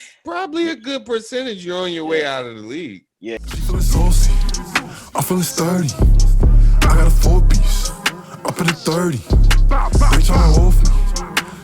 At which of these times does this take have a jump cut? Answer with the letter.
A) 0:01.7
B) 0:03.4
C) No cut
B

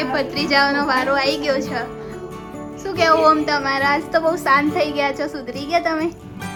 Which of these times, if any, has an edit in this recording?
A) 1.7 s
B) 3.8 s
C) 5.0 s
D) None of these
D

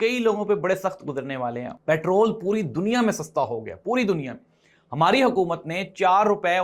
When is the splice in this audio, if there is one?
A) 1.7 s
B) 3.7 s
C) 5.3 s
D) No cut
A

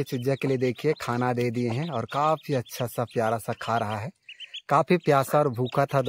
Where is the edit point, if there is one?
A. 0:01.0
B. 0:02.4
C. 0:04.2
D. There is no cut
D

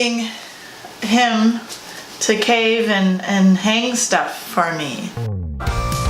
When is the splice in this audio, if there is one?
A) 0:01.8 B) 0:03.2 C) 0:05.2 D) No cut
C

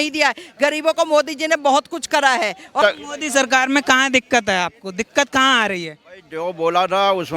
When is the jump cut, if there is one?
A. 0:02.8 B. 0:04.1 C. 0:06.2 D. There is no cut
A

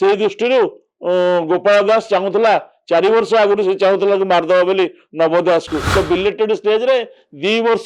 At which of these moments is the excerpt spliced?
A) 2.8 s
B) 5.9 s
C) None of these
B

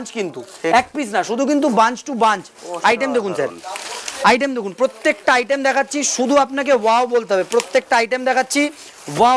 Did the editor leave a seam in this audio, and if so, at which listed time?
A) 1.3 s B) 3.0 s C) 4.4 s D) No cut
D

